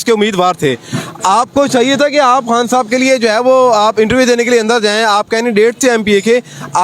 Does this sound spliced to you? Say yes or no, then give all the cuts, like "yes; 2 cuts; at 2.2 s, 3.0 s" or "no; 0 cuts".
no; 0 cuts